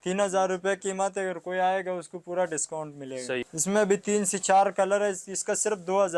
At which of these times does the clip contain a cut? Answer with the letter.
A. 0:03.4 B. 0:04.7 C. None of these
A